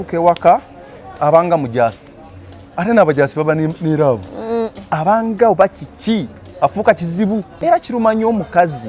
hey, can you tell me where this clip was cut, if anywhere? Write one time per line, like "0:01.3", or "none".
0:07.5

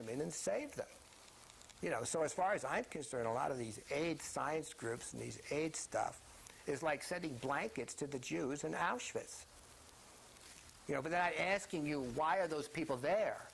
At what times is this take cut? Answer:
0:05.7

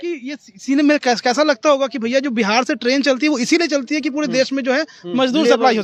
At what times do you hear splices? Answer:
none

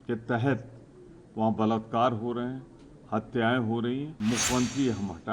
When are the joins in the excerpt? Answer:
0:04.1

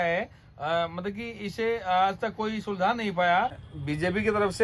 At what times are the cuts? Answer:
0:03.7

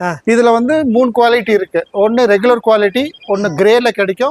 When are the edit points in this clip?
none

